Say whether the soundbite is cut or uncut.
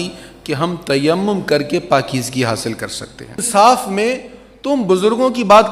cut